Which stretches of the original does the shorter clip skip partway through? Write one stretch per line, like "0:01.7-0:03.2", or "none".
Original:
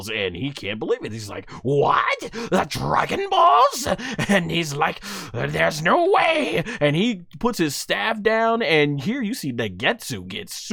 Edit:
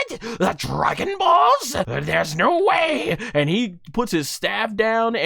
0:04.0-0:05.4